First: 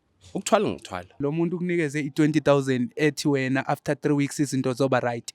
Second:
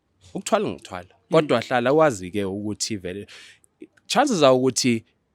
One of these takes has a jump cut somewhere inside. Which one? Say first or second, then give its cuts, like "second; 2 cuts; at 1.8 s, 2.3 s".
first; 1 cut; at 1.2 s